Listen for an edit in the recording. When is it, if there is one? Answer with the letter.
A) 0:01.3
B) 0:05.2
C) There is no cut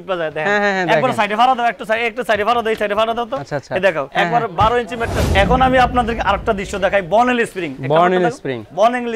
B